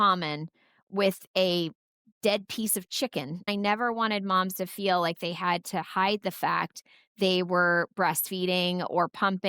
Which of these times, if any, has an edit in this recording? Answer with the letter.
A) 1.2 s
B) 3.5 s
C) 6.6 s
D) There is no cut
B